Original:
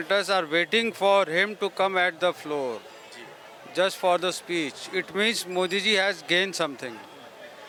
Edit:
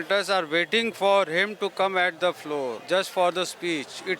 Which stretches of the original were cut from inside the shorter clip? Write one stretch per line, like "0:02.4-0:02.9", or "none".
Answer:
0:02.8-0:03.7